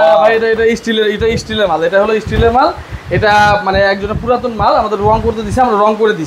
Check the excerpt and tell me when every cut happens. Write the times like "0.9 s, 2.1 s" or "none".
none